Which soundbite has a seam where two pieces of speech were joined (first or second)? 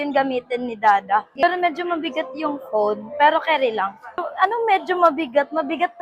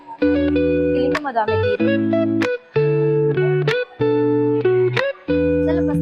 first